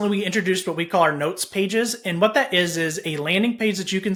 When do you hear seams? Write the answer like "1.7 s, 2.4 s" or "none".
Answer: none

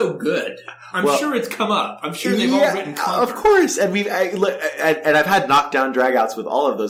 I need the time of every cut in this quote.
none

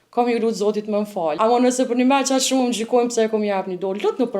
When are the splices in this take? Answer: 1.4 s

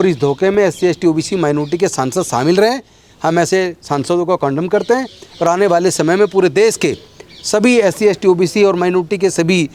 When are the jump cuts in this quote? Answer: none

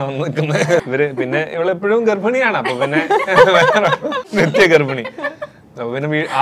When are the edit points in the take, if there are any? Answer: 0.8 s, 4.2 s

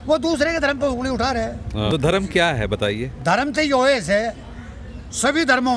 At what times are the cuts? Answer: 1.9 s

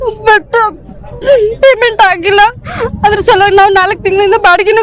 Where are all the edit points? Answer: none

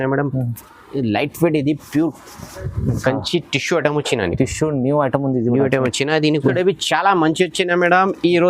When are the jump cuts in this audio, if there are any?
6.5 s

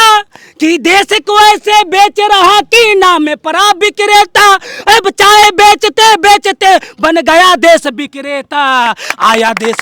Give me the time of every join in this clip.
none

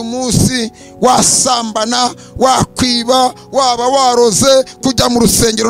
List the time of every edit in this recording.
none

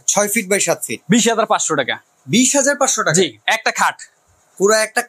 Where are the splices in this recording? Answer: none

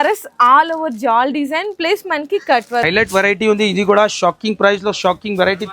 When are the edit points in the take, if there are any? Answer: 2.8 s

